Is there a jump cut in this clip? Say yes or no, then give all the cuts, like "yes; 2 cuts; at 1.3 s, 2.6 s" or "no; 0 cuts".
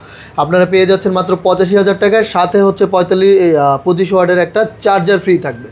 no; 0 cuts